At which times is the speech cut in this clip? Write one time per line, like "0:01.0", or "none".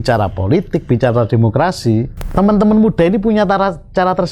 0:02.2